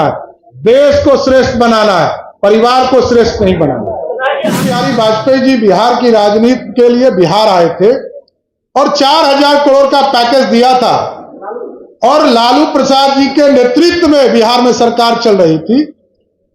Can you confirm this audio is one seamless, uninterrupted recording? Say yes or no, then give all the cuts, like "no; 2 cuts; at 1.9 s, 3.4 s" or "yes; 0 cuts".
no; 1 cut; at 4.7 s